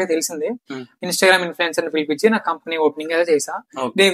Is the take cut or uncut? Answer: uncut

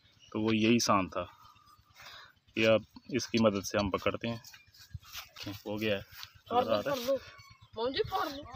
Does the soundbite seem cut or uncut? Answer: cut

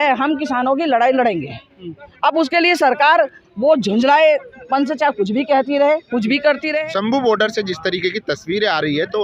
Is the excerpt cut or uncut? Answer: cut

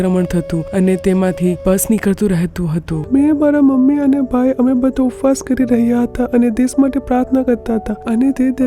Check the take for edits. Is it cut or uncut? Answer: cut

